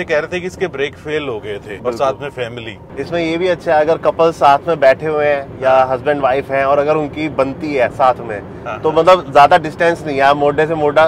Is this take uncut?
no; 2 cuts; at 1.7 s, 2.8 s

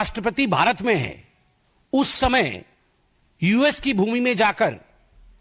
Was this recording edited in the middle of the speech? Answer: no; 0 cuts

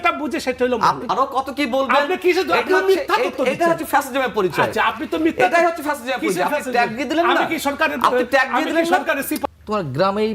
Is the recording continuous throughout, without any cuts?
no; 2 cuts; at 1.1 s, 9.4 s

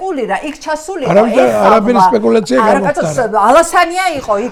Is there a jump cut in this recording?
no; 0 cuts

